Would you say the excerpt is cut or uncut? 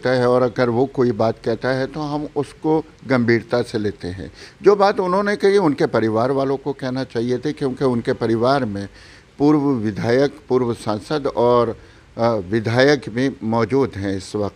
uncut